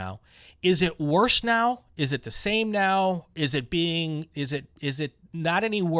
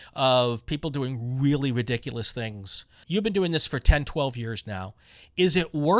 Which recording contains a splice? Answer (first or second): second